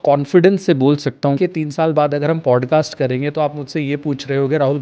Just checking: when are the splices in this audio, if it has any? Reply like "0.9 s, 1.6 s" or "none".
1.4 s

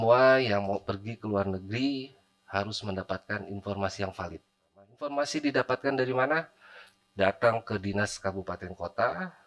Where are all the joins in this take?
5.0 s

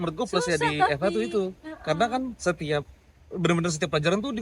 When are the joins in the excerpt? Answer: none

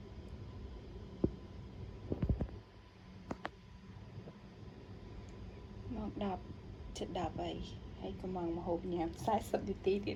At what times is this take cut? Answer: none

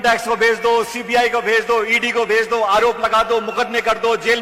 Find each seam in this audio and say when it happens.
none

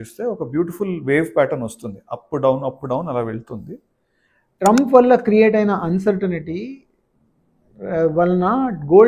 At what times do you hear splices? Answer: 4.6 s

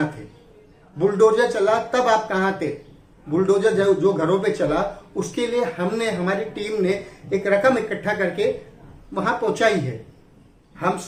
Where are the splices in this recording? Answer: none

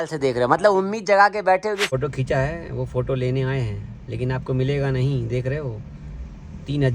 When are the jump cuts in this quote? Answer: 1.9 s

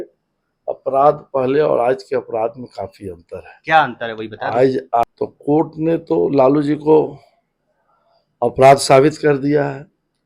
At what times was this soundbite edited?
5.0 s

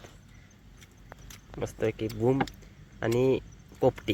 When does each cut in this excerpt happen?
none

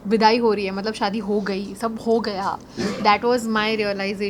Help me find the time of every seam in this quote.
none

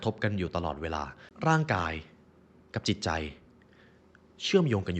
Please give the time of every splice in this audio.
1.2 s

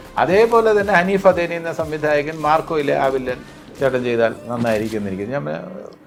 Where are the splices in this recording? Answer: none

